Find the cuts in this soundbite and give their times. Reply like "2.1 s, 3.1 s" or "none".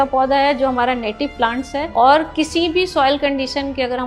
1.9 s